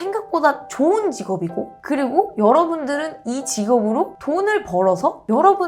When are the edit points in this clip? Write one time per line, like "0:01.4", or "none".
none